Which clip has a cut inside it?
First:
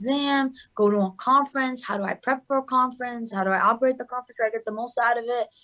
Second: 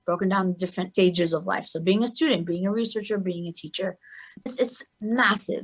second; 2 cuts; at 0.9 s, 4.5 s

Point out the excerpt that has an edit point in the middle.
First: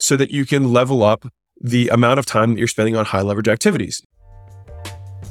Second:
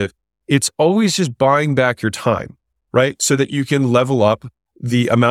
first; 1 cut; at 3.9 s

